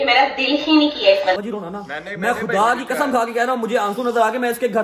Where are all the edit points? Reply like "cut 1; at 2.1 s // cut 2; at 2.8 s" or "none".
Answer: cut 1; at 1.4 s